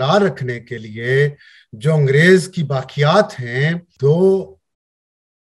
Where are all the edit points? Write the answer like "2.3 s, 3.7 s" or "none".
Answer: 3.9 s